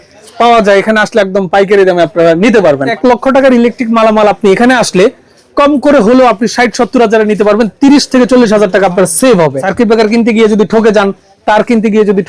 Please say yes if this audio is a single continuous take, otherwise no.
no